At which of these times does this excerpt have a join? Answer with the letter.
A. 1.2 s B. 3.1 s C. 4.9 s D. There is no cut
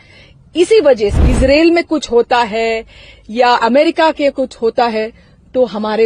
A